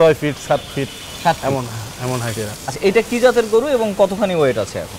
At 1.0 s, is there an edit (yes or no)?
no